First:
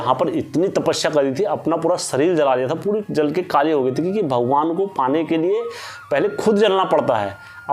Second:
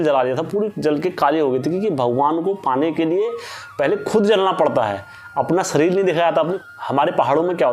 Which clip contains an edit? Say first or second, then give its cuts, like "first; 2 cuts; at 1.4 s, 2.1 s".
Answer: second; 1 cut; at 6.8 s